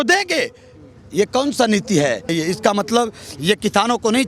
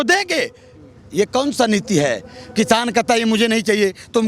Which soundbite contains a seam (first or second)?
first